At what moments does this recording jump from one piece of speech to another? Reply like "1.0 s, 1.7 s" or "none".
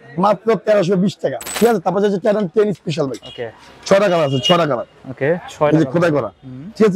1.4 s